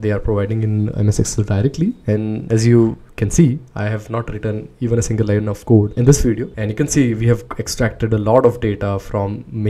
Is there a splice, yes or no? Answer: yes